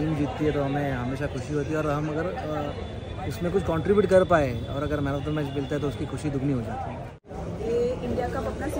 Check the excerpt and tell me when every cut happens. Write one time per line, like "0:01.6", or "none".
0:07.3